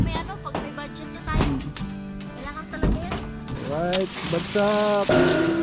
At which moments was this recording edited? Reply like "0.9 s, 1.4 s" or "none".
3.4 s